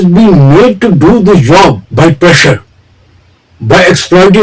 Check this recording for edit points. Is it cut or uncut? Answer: cut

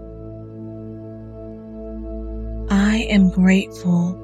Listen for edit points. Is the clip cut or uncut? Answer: cut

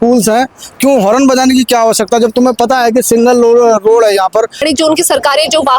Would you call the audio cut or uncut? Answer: cut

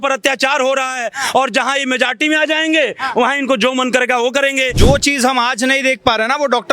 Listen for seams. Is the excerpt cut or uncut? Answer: cut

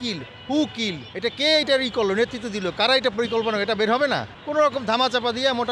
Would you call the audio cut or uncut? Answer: uncut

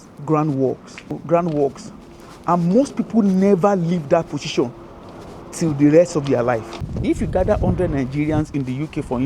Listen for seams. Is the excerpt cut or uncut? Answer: cut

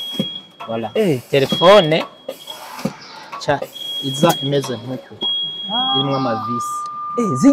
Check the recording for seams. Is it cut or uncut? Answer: uncut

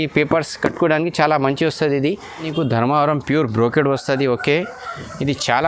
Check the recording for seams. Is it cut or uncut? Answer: cut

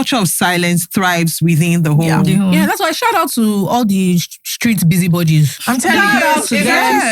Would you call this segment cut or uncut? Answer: uncut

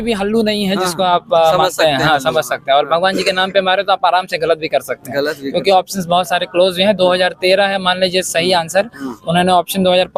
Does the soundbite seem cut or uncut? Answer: uncut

